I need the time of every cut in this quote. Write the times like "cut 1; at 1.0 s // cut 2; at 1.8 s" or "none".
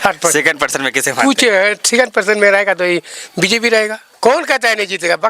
cut 1; at 4.0 s